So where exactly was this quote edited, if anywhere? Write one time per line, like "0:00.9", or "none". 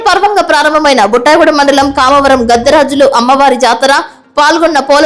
none